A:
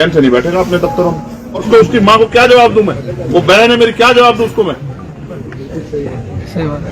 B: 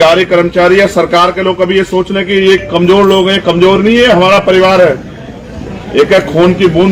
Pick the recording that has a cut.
A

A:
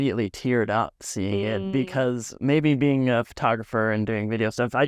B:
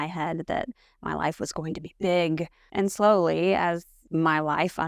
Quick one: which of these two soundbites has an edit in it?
B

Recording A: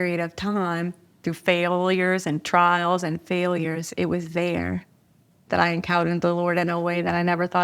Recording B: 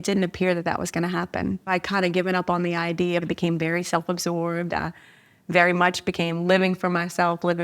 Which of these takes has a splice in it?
B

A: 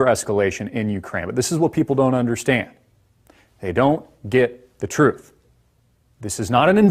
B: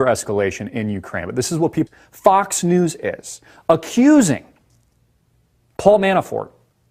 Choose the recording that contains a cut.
A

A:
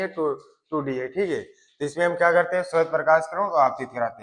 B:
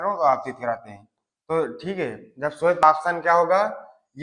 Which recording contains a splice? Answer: B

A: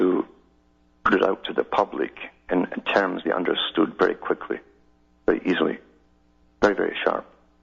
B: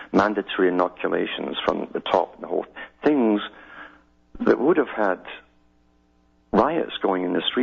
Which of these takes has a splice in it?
A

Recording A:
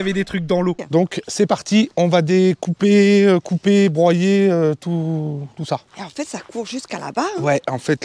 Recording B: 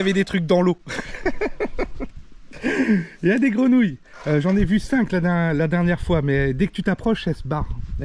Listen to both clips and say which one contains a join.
A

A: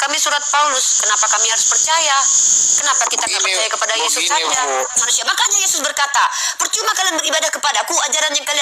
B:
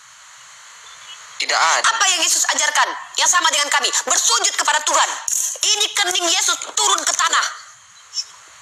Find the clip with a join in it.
A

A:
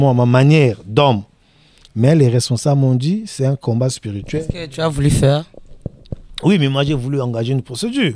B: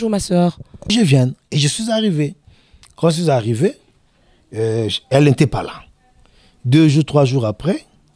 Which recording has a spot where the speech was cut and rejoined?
B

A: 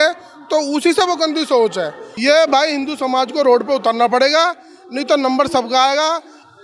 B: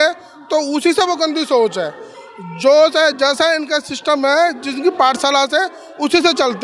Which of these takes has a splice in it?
A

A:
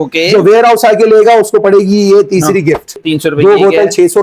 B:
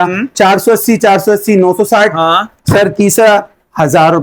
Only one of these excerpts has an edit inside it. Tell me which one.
A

